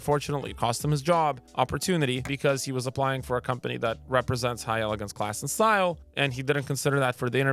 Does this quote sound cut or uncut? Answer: uncut